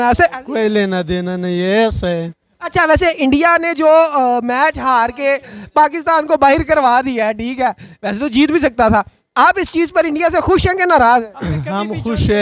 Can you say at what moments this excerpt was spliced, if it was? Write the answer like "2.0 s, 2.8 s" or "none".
none